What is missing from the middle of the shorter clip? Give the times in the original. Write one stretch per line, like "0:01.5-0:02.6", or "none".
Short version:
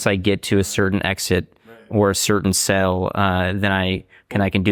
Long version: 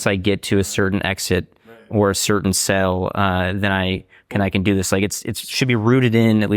none